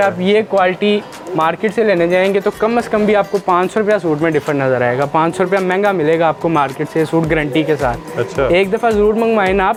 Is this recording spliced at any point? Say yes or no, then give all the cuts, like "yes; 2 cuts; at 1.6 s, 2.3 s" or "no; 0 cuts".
no; 0 cuts